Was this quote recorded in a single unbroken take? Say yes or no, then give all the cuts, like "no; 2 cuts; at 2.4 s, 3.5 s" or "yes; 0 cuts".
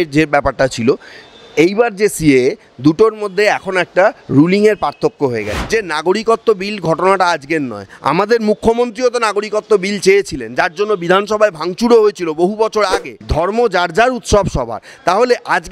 no; 2 cuts; at 5.5 s, 13.2 s